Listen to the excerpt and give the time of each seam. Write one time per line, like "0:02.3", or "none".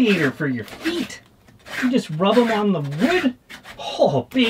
none